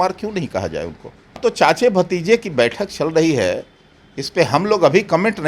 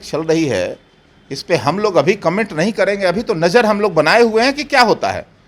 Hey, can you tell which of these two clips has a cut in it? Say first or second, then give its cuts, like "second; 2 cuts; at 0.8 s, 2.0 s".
first; 1 cut; at 1.4 s